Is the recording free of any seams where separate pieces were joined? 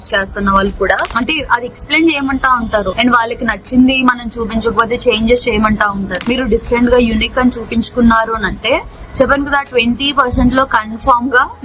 no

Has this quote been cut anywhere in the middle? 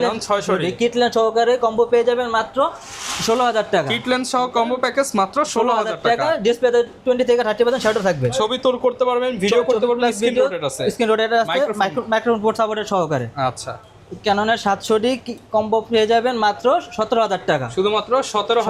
no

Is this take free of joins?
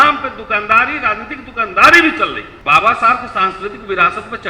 no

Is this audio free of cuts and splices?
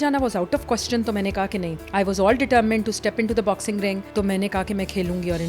no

